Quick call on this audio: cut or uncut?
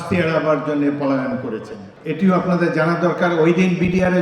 cut